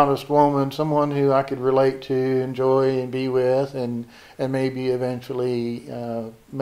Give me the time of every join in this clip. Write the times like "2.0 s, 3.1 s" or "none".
none